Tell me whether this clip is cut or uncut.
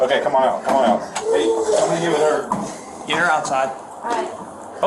cut